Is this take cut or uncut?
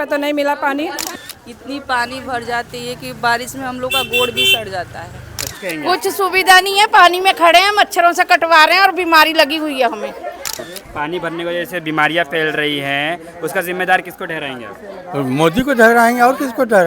cut